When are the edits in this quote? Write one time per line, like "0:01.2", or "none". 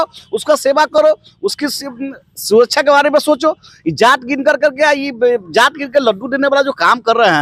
none